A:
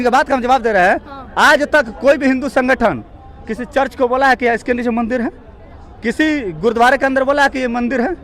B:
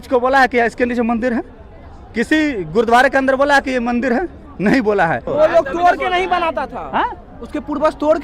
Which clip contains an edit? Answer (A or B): B